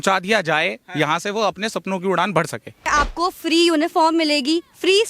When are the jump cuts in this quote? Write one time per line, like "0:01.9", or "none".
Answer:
0:02.9